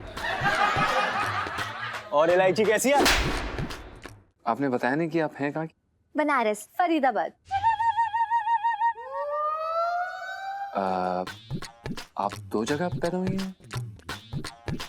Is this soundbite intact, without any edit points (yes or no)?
no